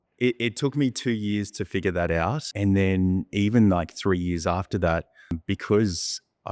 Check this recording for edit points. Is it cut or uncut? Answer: cut